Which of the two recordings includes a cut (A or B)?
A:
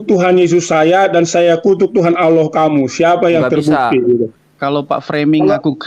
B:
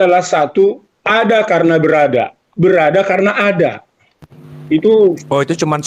A